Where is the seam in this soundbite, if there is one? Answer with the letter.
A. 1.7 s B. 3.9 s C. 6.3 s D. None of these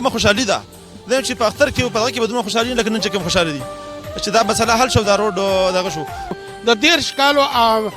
C